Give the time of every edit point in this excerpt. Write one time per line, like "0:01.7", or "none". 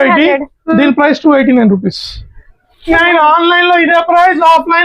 0:02.9